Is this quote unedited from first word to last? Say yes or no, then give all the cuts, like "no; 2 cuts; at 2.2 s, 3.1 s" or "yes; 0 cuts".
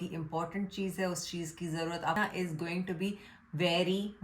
no; 1 cut; at 2.2 s